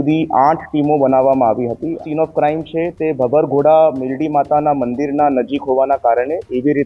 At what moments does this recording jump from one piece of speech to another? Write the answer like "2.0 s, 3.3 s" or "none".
2.0 s